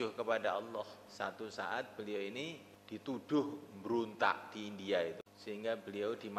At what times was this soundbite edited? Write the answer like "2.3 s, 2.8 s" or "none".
1.0 s, 2.7 s, 5.3 s